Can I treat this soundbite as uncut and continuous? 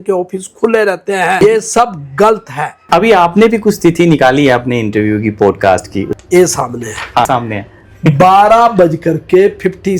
no; 4 cuts; at 1.4 s, 2.7 s, 6.1 s, 7.3 s

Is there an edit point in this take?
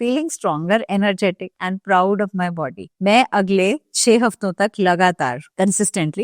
no; 0 cuts

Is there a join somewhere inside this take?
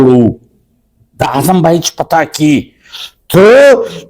no; 0 cuts

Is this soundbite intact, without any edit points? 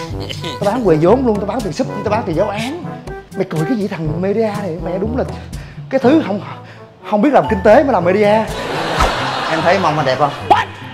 no; 1 cut; at 9.1 s

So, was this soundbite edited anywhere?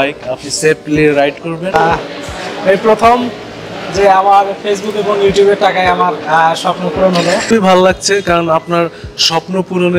yes; 2 cuts; at 1.7 s, 7.5 s

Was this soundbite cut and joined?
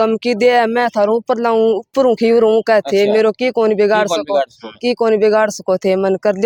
no; 0 cuts

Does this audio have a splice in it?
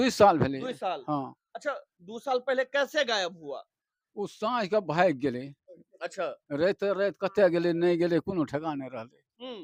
no; 0 cuts

